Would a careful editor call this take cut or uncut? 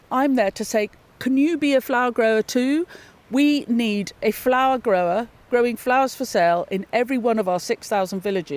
uncut